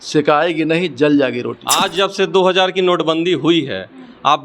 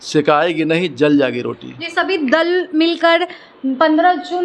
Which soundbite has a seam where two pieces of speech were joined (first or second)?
first